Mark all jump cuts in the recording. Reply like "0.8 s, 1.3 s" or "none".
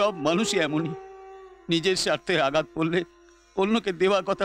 none